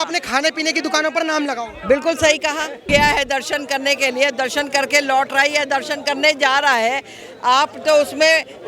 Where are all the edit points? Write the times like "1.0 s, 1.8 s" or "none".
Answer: 2.8 s

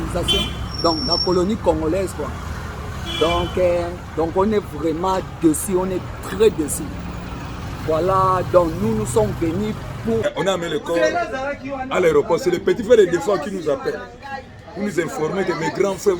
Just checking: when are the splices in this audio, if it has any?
10.2 s

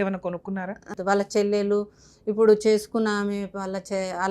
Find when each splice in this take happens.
0.9 s

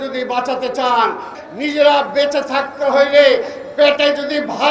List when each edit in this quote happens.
1.3 s

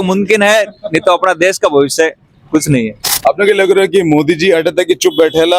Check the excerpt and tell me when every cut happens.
3.0 s

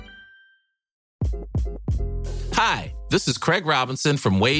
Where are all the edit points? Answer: 1.0 s

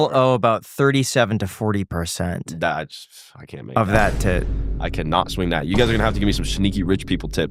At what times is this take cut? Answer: none

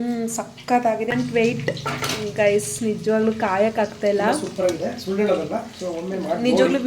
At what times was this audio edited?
1.1 s

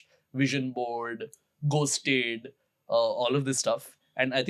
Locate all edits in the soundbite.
none

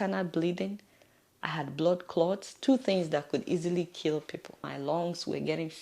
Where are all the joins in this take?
4.7 s

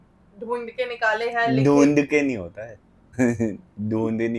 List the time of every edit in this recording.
none

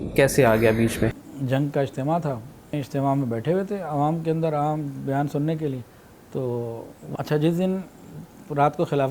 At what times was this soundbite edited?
1.3 s, 2.8 s, 7.0 s

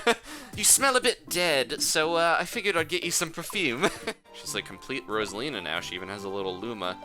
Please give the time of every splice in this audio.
4.2 s

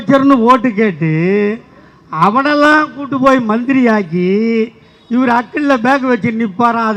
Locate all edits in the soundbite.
none

